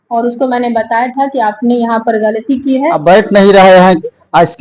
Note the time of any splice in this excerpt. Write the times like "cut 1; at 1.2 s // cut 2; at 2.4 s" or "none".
cut 1; at 2.8 s